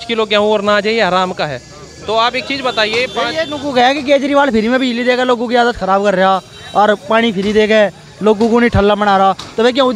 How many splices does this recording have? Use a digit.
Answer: 0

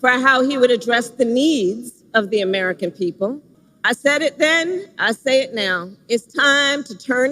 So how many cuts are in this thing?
1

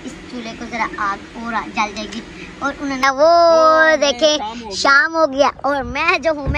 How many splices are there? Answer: 1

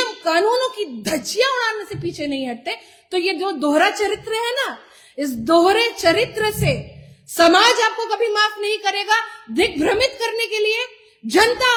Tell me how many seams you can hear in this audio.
0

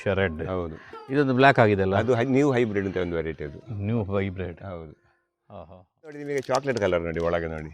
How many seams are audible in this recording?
1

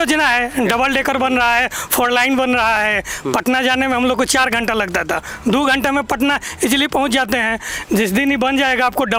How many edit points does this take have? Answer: 0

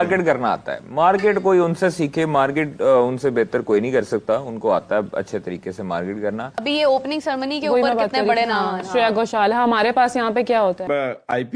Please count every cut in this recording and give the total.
2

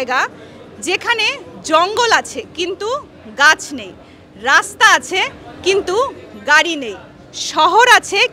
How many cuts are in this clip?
0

